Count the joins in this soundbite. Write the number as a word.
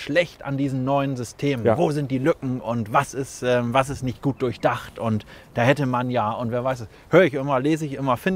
zero